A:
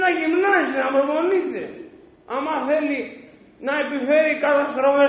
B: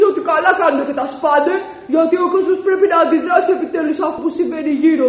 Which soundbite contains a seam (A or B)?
B